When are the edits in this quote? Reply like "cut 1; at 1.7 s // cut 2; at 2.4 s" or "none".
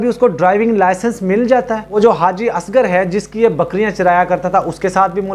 cut 1; at 1.9 s